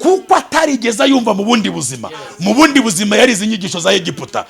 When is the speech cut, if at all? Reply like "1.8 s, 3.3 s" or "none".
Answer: none